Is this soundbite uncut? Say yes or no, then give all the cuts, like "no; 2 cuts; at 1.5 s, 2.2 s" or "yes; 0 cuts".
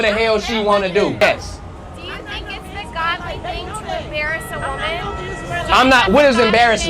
no; 1 cut; at 1.2 s